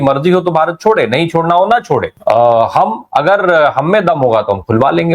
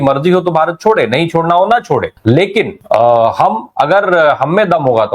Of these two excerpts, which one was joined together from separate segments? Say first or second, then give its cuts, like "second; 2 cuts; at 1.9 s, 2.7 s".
first; 1 cut; at 2.1 s